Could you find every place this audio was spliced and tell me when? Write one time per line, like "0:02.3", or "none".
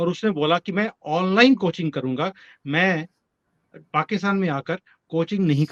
none